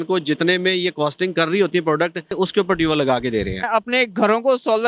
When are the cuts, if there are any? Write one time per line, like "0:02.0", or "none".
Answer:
0:02.3
0:03.6